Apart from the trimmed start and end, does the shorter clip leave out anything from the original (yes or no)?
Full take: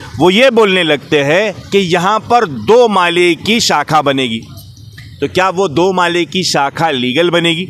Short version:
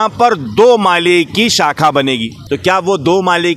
yes